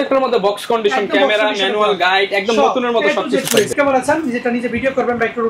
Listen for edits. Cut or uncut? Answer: cut